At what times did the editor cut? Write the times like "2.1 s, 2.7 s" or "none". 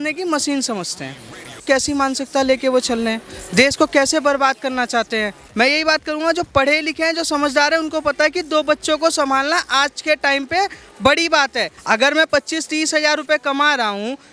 1.6 s, 5.4 s, 11.7 s